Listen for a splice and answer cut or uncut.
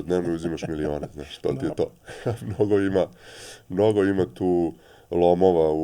uncut